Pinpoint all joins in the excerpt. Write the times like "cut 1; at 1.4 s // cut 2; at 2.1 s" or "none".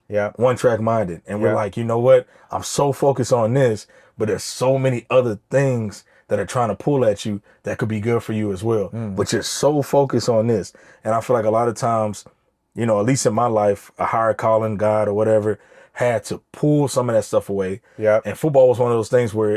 none